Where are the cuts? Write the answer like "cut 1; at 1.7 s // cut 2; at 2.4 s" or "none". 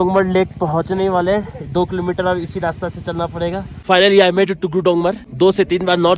cut 1; at 3.7 s // cut 2; at 5.2 s